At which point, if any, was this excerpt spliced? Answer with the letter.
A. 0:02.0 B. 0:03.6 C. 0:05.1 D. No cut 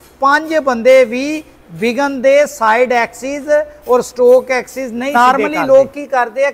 C